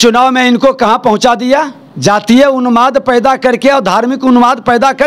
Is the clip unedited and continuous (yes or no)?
no